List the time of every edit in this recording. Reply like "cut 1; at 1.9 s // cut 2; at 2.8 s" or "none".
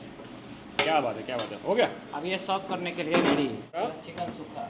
none